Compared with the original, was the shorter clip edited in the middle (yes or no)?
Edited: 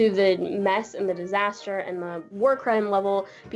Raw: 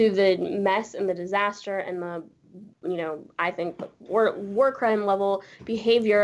yes